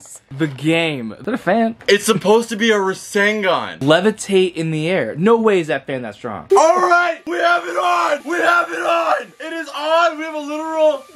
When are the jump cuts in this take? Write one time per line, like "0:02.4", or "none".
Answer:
0:03.8
0:06.4